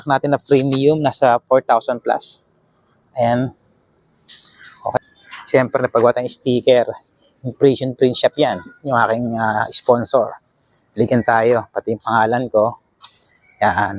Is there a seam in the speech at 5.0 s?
yes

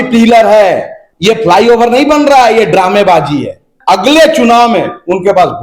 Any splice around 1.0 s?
yes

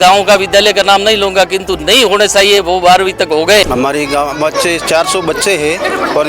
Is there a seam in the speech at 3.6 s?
yes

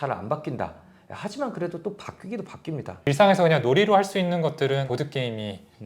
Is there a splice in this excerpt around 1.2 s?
no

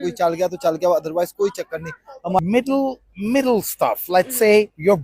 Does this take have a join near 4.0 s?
no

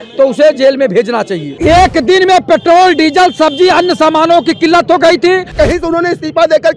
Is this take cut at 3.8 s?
no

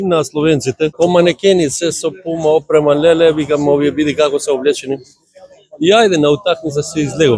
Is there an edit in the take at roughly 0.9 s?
yes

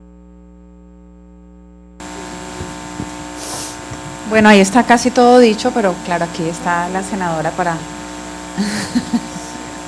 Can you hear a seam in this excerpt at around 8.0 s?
no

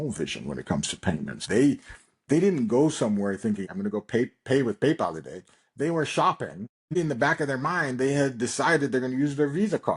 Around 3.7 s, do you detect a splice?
yes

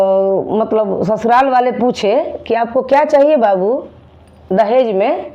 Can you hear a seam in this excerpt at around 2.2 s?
no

